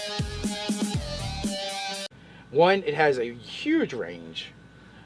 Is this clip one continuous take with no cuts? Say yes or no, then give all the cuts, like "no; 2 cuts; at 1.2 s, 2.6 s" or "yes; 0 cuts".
yes; 0 cuts